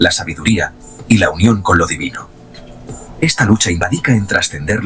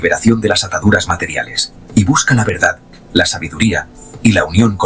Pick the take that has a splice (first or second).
first